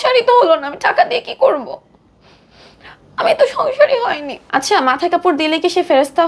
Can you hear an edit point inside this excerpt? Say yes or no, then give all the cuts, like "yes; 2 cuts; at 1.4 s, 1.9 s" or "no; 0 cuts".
yes; 1 cut; at 4.3 s